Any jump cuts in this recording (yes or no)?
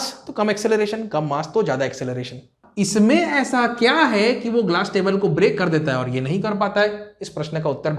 yes